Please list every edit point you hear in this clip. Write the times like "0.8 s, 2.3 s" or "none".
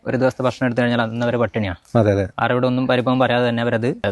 2.3 s